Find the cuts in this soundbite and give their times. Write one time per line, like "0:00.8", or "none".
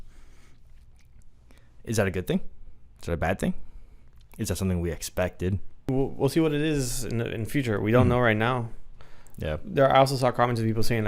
0:05.9